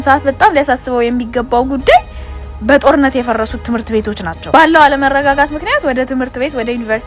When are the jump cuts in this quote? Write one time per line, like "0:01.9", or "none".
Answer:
none